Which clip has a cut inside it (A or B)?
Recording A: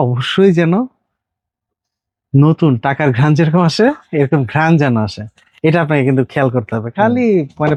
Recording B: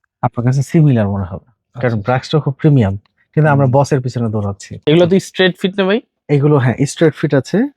B